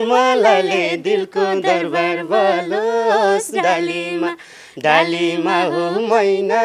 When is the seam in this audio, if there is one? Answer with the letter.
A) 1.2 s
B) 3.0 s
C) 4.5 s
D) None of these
D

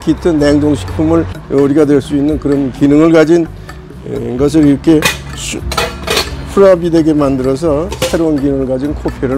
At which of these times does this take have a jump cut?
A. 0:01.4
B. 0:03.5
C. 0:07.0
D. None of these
A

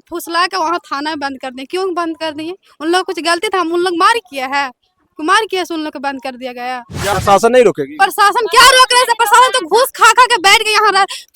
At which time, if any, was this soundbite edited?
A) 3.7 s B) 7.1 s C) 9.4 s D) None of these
B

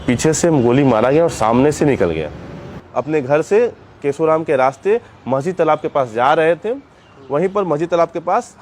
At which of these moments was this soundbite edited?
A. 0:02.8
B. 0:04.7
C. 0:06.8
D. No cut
A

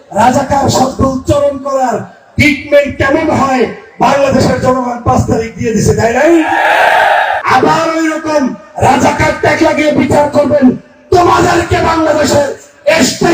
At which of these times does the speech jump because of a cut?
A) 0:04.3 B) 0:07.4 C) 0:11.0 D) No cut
B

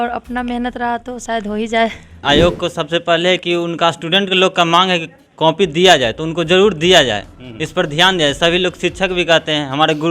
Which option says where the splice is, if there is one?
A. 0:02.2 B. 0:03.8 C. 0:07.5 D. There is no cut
A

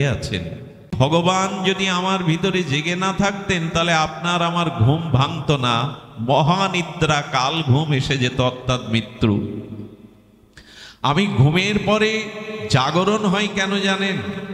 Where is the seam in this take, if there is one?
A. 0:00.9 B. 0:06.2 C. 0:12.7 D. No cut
A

